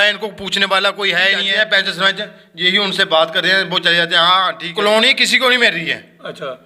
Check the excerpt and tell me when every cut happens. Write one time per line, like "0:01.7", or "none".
0:01.5
0:04.8